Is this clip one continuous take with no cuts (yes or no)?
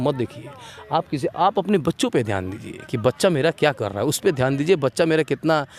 yes